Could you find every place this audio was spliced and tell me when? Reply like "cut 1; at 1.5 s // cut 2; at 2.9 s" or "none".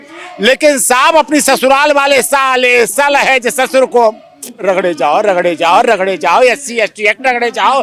none